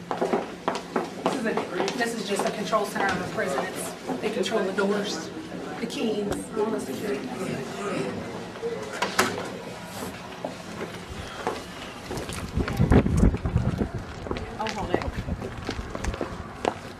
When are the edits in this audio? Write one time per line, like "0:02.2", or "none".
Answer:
0:12.0